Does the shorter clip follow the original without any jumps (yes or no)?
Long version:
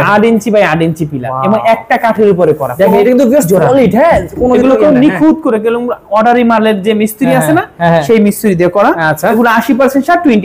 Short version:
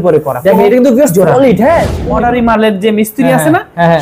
no